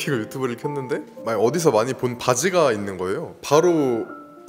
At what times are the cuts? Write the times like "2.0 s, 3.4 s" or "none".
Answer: 3.4 s